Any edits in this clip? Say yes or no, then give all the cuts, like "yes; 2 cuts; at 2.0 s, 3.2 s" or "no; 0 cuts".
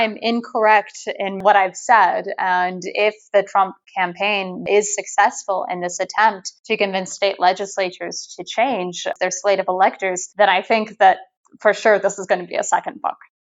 yes; 3 cuts; at 6.5 s, 9.1 s, 10.2 s